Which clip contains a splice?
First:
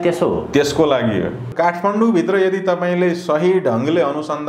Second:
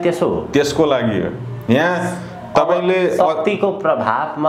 first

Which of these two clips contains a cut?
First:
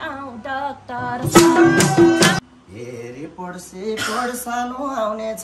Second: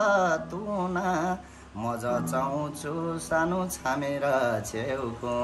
first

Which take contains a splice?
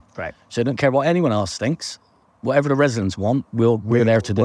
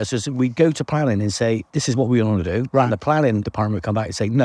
second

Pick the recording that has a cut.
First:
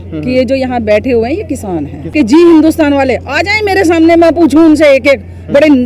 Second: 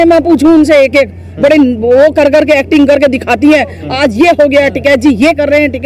first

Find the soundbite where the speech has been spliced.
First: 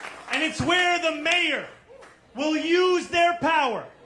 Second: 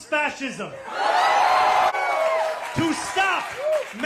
second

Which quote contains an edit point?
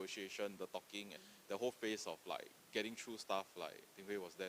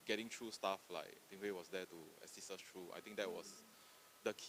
first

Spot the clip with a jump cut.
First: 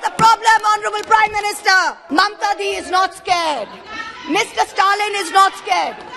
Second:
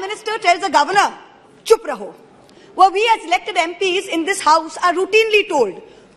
first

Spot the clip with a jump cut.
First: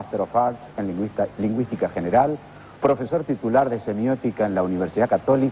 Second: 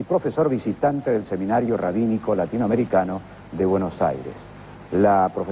second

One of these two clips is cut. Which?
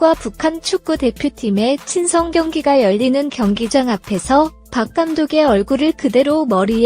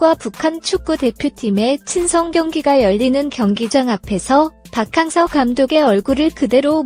first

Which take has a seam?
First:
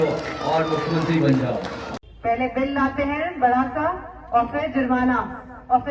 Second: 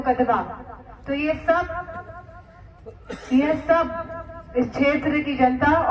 first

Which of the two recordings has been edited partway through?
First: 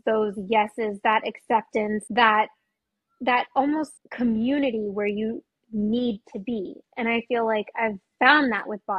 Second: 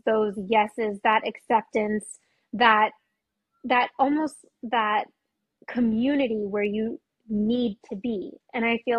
first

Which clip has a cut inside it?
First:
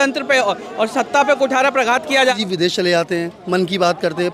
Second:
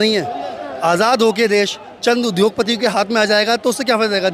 first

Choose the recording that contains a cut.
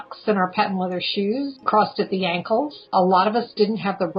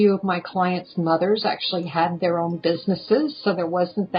first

